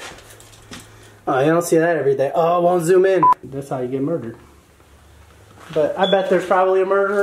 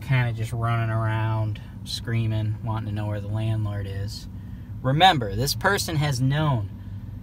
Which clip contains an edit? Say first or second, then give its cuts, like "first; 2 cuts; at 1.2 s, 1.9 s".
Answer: first; 1 cut; at 3.5 s